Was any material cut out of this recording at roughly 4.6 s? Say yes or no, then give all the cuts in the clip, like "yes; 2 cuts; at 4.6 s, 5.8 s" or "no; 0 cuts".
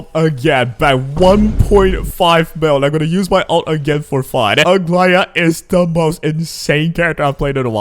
yes; 1 cut; at 4.6 s